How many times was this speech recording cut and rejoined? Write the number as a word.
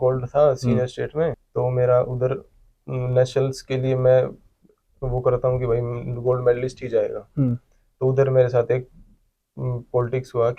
one